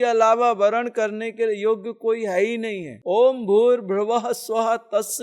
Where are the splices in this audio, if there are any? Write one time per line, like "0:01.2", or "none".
none